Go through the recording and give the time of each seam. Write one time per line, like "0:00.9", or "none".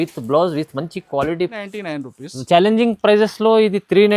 0:01.6